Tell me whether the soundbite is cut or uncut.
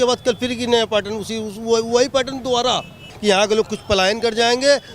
cut